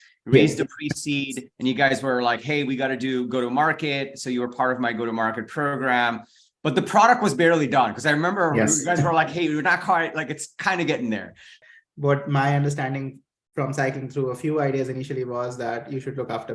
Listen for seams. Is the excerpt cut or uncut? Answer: cut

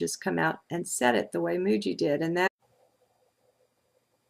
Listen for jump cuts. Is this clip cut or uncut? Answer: uncut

